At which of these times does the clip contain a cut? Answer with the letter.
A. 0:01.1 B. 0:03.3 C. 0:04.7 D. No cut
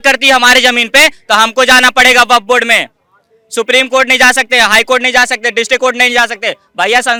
D